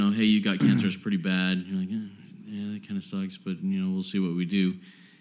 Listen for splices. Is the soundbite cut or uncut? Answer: uncut